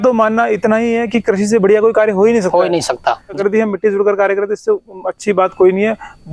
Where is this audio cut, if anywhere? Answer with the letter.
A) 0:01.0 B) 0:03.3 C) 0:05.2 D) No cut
B